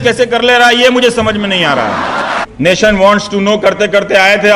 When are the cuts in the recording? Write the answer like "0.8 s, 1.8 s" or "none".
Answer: 2.4 s

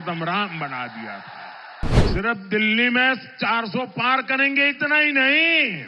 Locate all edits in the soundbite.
2.0 s

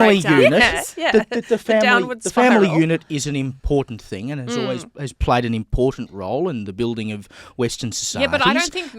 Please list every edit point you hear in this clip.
none

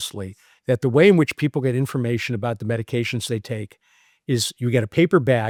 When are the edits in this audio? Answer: none

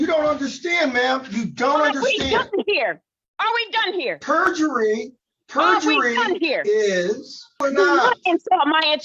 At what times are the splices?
7.6 s

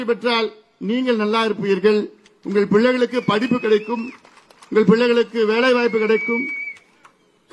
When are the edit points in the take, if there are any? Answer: none

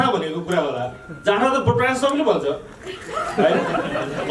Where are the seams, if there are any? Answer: none

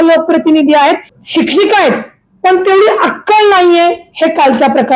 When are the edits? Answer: 1.1 s

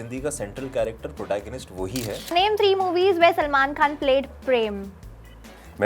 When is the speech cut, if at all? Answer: 2.3 s

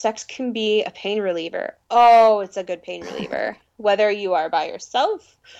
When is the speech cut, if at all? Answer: none

